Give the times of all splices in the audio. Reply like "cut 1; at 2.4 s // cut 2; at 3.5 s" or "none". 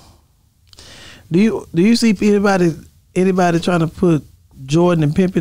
none